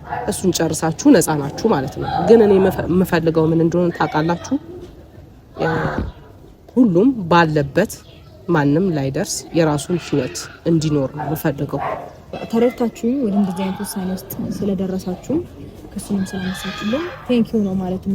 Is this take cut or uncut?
cut